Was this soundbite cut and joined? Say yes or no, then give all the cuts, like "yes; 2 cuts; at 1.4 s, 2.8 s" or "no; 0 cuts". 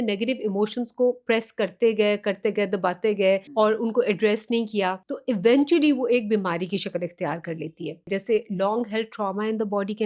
yes; 3 cuts; at 3.5 s, 5.1 s, 8.1 s